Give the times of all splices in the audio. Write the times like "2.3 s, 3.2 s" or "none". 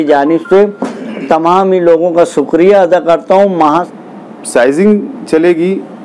3.9 s